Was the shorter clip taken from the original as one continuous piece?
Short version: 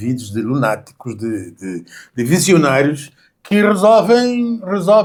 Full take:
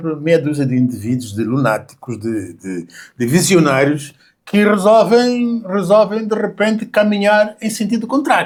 yes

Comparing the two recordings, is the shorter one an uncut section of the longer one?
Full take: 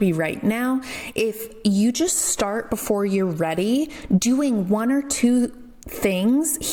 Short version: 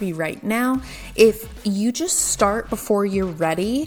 yes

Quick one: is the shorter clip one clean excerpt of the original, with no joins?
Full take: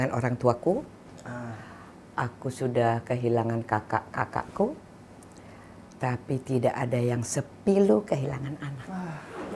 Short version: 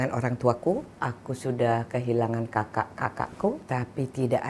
no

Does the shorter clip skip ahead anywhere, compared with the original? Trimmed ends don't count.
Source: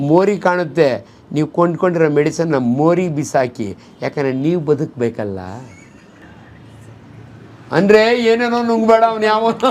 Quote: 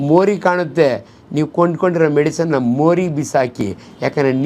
no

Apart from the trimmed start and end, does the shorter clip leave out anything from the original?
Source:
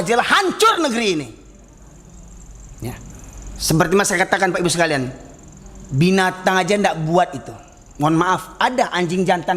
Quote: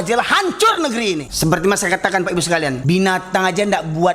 yes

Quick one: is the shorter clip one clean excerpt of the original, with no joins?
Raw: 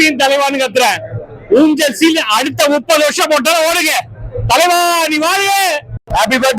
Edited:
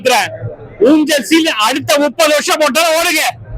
yes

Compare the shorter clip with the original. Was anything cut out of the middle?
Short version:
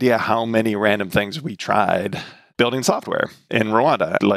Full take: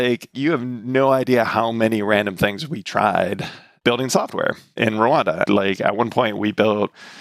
no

